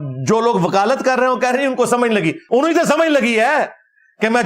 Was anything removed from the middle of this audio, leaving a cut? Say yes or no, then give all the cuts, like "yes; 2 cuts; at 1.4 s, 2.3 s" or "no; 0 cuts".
yes; 1 cut; at 2.4 s